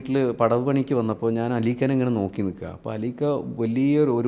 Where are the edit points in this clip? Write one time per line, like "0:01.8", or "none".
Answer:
none

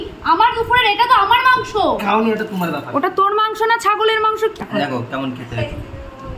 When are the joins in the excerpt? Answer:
0:04.6

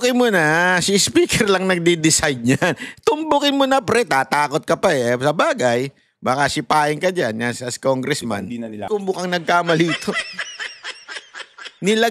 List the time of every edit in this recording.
0:08.9

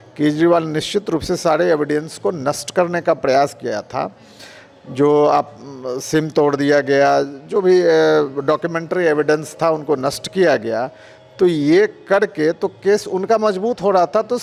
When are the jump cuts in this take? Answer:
none

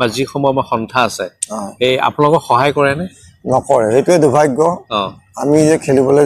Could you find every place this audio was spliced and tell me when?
none

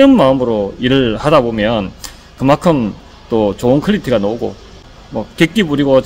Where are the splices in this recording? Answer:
0:04.8

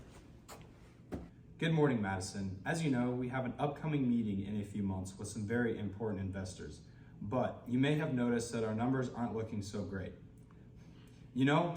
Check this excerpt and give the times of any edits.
0:01.4

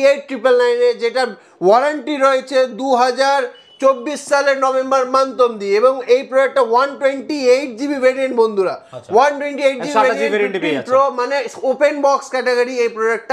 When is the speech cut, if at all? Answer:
none

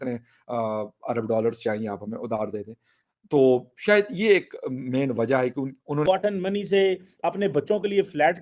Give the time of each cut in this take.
0:06.0

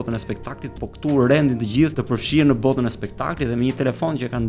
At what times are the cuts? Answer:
0:02.0

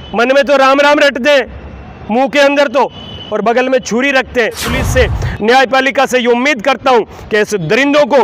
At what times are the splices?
0:04.7

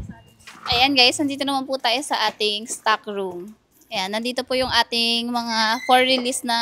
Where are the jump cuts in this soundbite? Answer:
none

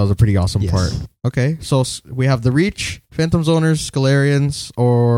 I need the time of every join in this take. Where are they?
0:01.1

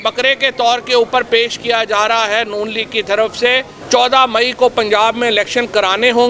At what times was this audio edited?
0:03.7

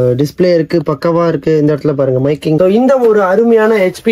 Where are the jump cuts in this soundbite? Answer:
0:02.6

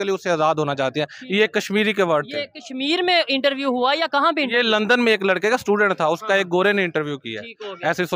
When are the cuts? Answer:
none

